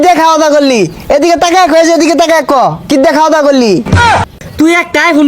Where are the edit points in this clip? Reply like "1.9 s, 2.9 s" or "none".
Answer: 3.9 s